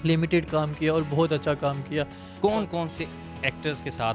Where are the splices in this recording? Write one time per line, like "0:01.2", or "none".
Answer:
0:02.2